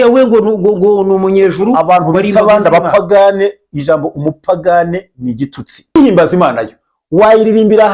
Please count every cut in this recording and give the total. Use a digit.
1